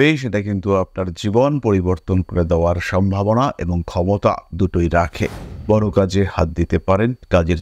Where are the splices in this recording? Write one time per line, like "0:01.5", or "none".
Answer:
0:05.5